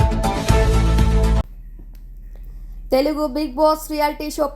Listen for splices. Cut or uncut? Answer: cut